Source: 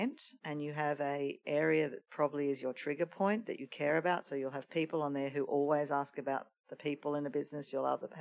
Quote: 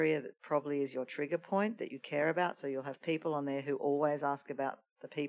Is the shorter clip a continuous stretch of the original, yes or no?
yes